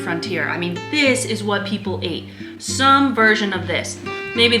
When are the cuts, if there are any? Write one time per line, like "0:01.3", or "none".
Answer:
none